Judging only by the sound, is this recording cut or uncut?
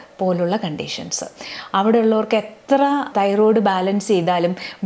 cut